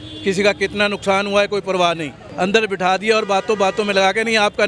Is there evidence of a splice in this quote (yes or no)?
yes